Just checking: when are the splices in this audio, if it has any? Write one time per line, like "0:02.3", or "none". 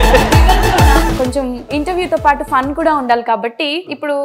0:01.1

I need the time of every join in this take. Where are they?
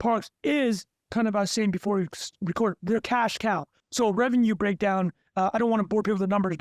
0:03.8

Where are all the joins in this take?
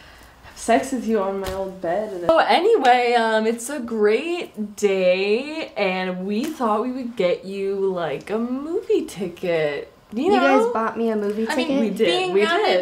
0:03.8

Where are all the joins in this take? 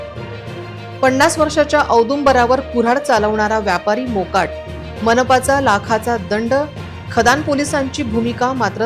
none

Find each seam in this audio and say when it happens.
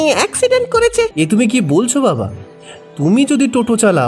0:01.1

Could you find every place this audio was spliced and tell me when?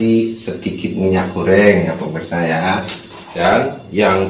0:03.4

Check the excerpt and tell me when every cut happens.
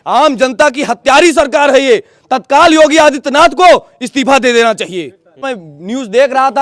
0:05.5

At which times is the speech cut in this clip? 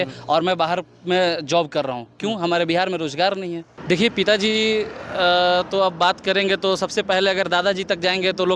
0:03.7

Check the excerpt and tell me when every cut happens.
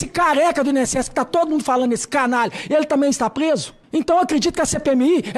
0:03.8

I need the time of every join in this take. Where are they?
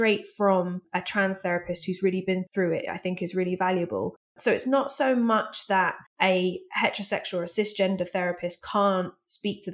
0:00.8
0:02.5
0:04.4
0:06.0

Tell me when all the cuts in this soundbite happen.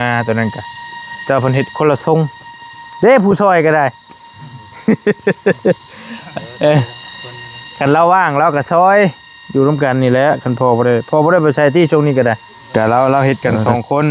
0:12.5

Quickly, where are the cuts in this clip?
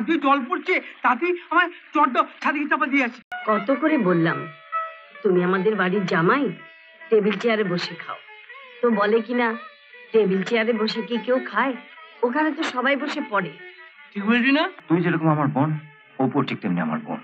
0:03.3
0:14.8

